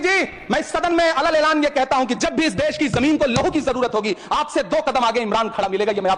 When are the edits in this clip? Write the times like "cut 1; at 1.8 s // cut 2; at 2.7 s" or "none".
none